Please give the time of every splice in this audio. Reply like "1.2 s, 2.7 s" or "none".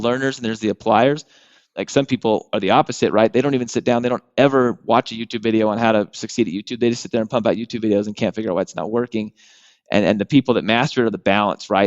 1.8 s